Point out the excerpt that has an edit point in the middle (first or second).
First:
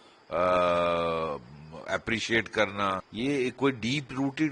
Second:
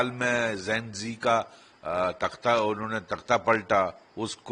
first